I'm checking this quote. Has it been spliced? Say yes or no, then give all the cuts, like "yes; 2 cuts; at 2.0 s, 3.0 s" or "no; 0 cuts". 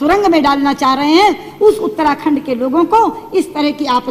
no; 0 cuts